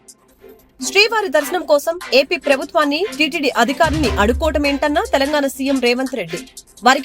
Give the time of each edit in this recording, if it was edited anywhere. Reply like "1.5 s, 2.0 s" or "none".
0.9 s